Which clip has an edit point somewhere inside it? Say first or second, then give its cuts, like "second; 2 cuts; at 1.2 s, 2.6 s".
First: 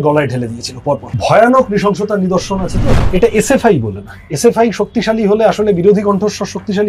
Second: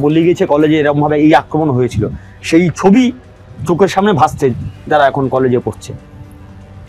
first; 2 cuts; at 1.1 s, 2.9 s